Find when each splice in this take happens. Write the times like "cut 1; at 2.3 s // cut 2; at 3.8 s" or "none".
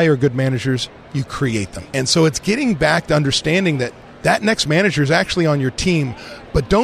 cut 1; at 1.3 s